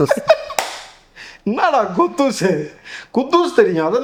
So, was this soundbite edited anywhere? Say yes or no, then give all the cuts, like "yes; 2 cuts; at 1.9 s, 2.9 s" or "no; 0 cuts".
no; 0 cuts